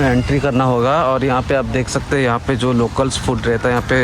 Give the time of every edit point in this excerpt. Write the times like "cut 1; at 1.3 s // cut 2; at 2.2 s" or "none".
none